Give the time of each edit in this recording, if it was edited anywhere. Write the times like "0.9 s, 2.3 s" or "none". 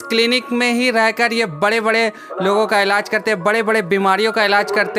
none